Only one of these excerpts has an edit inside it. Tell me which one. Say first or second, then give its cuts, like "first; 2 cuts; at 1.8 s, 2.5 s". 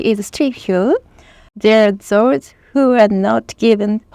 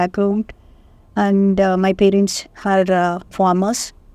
first; 1 cut; at 1.5 s